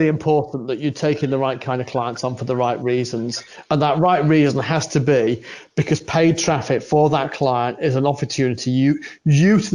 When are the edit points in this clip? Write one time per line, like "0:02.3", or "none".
none